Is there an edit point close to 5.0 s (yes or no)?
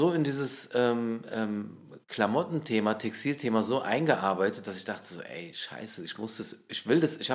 no